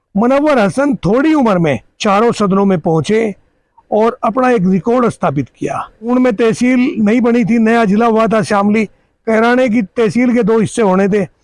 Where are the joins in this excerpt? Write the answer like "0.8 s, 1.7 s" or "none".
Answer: 1.9 s, 6.1 s